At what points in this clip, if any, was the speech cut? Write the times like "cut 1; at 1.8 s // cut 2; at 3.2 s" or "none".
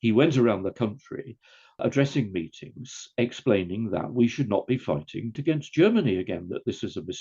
cut 1; at 1.8 s // cut 2; at 5.4 s